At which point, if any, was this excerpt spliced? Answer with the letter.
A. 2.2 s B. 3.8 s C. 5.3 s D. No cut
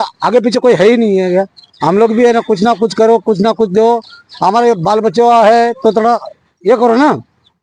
D